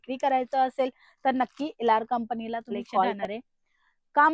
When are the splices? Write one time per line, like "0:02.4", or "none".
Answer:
0:03.2